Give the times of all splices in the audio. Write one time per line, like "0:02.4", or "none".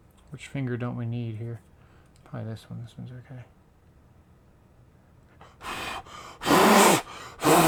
none